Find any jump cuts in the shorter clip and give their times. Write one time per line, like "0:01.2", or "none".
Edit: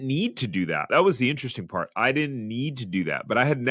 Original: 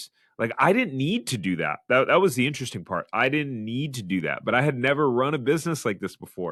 0:00.9